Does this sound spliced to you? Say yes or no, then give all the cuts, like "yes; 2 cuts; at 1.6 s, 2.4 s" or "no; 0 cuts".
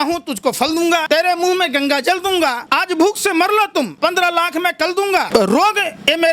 yes; 4 cuts; at 1.0 s, 2.6 s, 3.9 s, 5.3 s